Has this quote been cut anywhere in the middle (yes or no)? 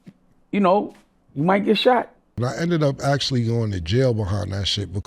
yes